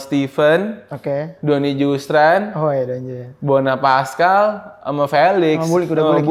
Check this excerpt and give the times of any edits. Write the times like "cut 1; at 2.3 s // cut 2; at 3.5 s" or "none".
none